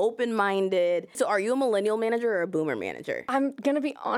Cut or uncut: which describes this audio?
cut